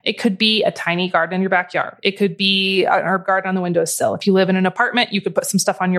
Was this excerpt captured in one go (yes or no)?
yes